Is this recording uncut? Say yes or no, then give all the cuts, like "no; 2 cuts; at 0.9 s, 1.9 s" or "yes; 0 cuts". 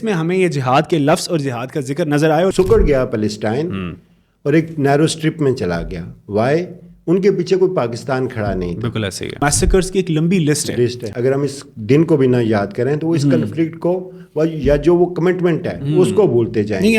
no; 3 cuts; at 2.5 s, 9.4 s, 11.0 s